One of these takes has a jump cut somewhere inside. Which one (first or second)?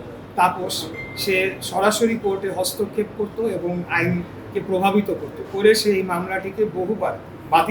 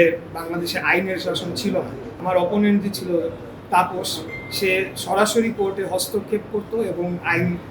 second